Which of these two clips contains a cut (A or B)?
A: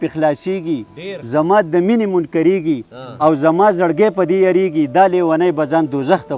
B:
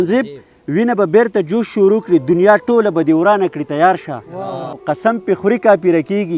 B